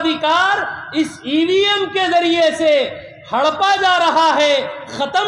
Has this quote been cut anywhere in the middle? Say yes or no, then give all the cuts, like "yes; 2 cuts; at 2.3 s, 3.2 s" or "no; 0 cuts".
no; 0 cuts